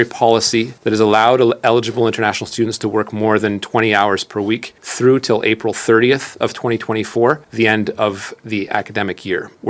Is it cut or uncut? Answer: uncut